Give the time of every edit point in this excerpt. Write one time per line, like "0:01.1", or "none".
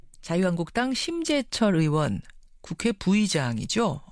none